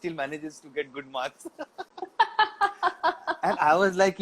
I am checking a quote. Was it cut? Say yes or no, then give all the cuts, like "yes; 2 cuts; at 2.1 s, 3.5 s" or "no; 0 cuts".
no; 0 cuts